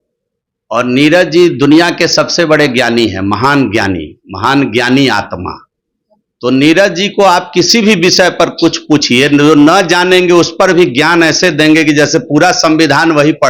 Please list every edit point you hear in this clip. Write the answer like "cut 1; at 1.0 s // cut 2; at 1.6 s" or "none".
none